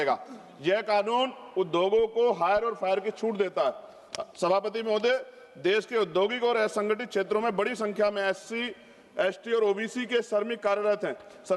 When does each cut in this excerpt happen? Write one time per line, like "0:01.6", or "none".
none